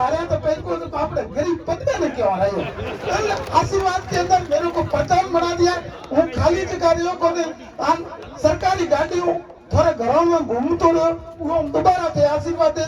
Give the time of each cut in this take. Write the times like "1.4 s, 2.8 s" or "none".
none